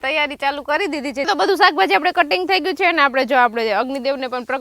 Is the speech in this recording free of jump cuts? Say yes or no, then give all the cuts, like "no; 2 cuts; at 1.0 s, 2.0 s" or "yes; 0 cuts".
no; 1 cut; at 1.3 s